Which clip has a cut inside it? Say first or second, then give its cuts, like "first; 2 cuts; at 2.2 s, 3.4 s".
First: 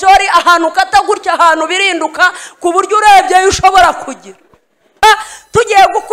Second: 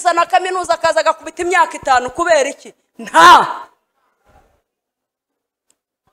first; 1 cut; at 5.0 s